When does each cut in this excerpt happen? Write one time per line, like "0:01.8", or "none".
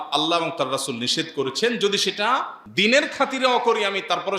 0:02.6

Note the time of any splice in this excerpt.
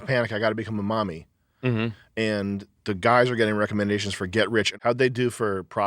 0:04.7

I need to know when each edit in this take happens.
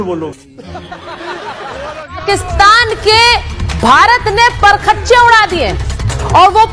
0:02.2

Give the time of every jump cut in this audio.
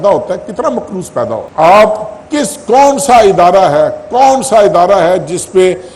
0:01.5

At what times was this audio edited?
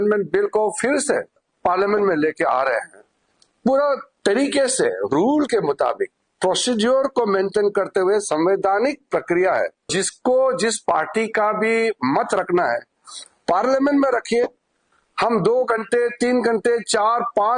0:09.9

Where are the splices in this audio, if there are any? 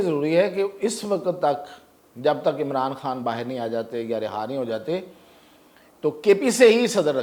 none

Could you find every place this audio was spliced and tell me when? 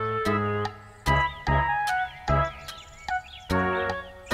none

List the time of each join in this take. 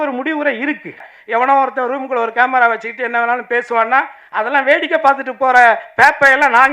0:01.0

